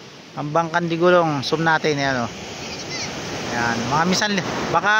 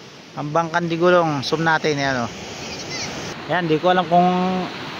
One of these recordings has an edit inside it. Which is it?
second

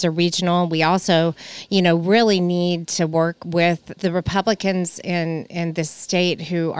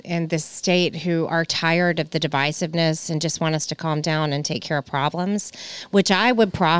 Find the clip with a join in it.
first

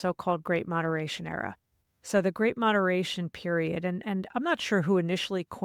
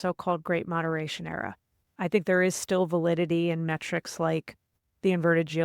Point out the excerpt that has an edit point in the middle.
second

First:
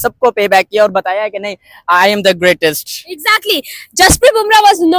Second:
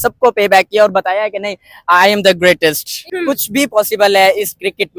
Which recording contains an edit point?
second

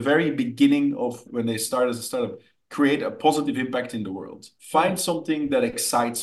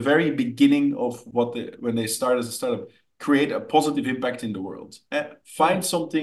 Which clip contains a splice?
first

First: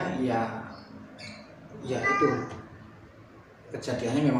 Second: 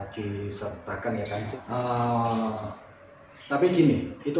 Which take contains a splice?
second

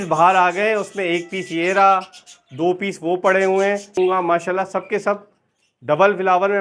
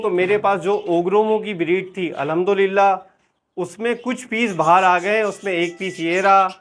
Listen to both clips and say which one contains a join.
first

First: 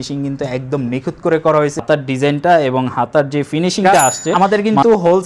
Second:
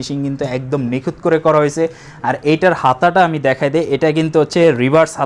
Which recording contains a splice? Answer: first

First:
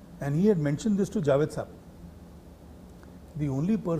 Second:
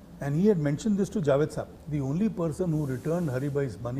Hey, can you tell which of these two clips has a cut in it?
second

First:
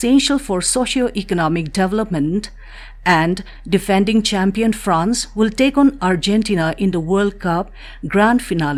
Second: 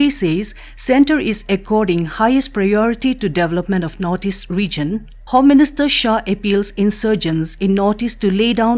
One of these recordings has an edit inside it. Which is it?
second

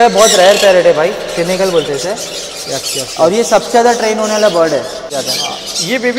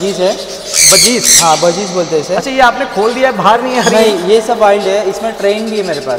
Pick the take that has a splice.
first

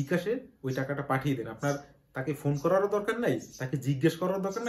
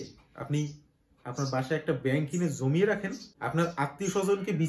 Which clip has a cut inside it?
second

